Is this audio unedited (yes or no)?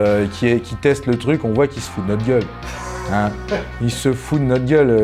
yes